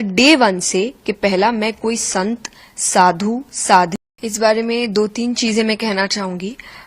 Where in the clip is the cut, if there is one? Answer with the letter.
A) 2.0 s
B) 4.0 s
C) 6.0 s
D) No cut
B